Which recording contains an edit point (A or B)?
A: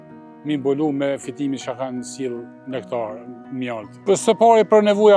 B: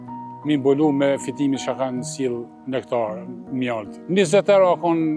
B